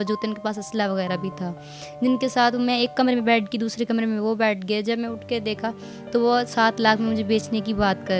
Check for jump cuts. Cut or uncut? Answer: uncut